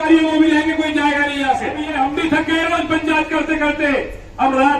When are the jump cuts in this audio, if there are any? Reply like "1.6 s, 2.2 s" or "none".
1.9 s